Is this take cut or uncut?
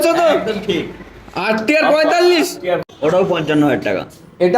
cut